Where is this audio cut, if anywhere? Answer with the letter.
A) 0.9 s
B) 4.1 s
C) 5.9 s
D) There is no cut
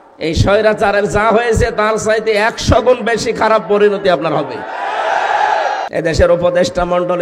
C